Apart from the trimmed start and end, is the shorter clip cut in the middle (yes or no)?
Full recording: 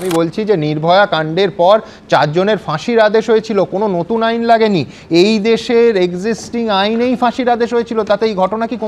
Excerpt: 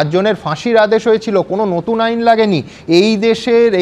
no